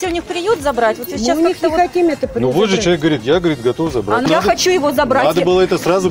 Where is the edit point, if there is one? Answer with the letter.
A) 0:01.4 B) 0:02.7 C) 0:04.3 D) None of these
C